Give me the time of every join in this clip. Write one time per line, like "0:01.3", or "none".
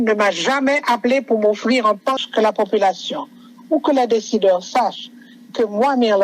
0:02.2